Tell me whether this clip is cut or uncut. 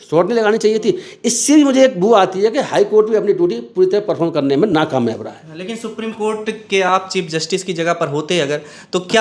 uncut